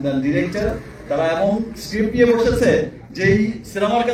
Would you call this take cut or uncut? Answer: uncut